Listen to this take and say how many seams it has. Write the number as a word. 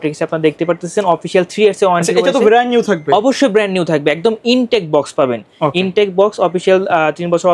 zero